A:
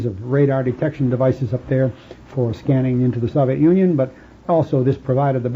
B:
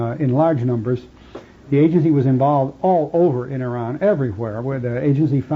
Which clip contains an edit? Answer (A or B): B